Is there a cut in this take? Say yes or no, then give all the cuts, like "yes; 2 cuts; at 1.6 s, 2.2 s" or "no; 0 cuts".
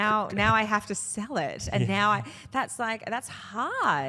no; 0 cuts